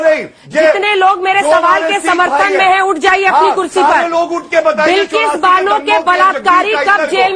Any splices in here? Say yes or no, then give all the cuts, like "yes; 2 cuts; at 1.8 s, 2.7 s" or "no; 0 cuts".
no; 0 cuts